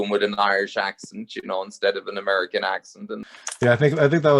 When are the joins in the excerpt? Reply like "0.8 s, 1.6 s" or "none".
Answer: 3.2 s